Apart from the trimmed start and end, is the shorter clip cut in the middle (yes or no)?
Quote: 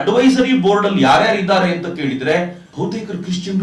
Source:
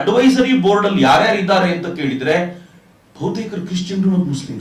yes